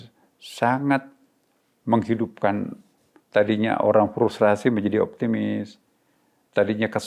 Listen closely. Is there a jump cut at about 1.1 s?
no; 0 cuts

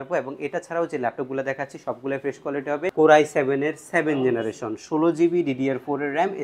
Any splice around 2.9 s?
yes; 1 cut; at 2.9 s

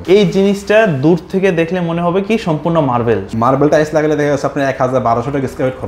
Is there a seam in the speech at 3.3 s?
yes; 1 cut; at 3.3 s

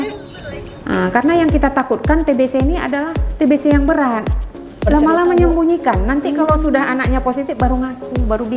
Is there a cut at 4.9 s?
yes; 1 cut; at 4.9 s

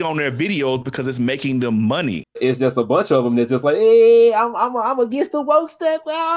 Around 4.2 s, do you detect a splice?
no; 1 cut; at 2.4 s

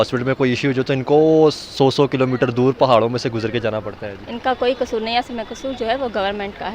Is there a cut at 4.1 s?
no; 0 cuts

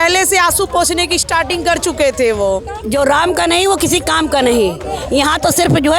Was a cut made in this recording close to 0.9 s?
no; 1 cut; at 2.8 s

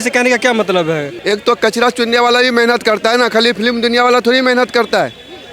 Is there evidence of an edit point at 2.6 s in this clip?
no; 1 cut; at 1.1 s

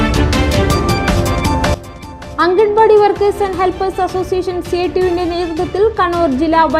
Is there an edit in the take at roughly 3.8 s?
no; 1 cut; at 1.7 s

